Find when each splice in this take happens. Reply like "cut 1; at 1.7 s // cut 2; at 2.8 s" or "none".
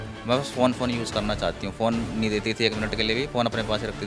none